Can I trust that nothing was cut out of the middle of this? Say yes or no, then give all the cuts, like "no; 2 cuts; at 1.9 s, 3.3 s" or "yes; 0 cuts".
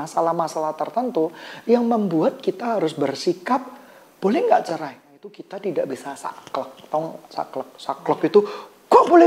no; 1 cut; at 5.5 s